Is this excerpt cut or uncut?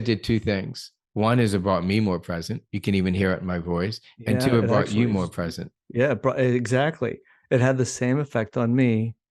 uncut